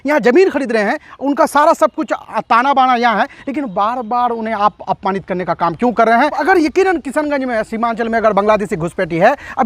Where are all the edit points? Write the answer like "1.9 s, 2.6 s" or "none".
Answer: 6.4 s